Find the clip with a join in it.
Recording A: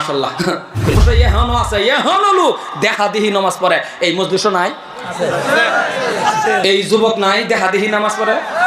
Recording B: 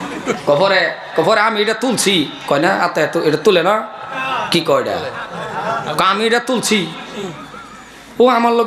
A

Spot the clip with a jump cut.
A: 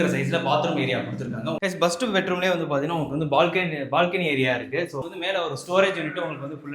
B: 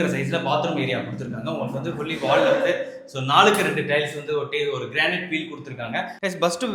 A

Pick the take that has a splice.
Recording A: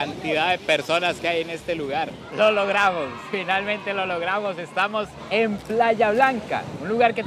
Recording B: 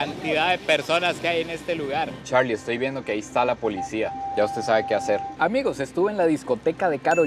B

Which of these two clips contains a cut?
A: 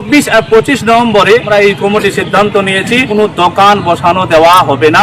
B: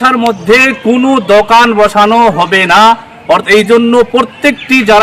A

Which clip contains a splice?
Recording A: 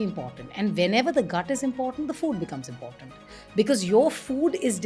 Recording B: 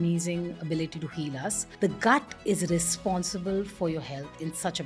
B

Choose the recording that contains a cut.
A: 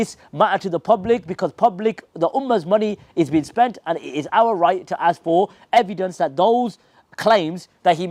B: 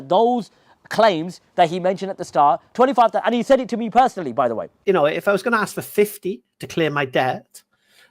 B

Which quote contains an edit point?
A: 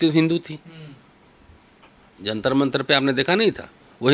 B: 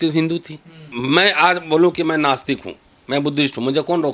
B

